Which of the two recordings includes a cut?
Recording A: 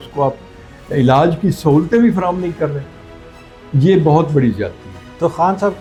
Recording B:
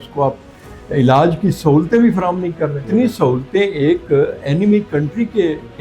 B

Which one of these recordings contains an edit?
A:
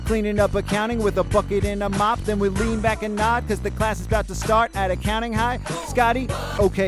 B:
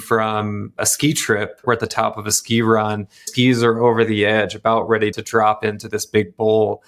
B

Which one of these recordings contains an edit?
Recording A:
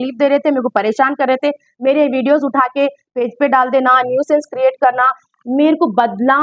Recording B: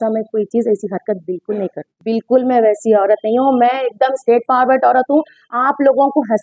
B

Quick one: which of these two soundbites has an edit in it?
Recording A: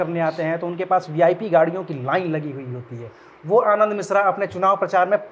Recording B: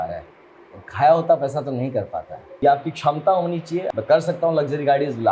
B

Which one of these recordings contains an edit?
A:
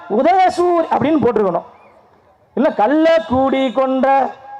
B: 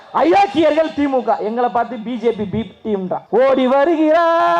B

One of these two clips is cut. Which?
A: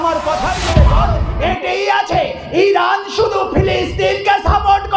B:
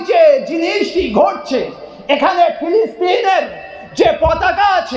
A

